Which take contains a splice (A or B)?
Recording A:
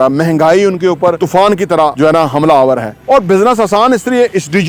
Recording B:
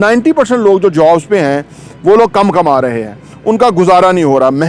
A